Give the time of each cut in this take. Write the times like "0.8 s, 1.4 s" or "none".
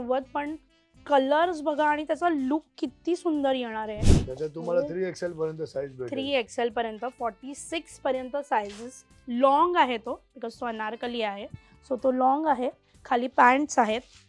4.1 s